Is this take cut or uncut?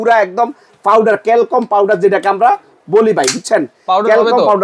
uncut